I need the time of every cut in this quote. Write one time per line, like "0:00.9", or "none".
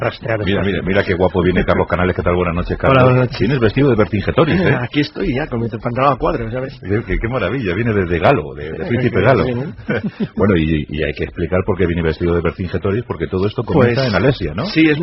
0:05.1